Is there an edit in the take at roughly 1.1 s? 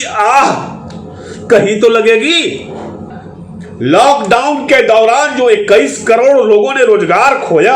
no; 1 cut; at 3.1 s

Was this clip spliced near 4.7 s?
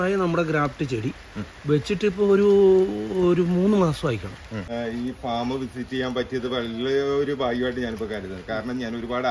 yes; 1 cut; at 4.7 s

